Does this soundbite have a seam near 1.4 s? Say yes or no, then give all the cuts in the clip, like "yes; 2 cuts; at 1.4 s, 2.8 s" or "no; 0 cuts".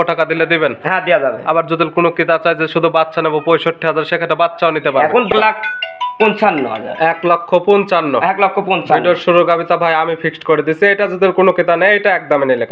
no; 1 cut; at 5.3 s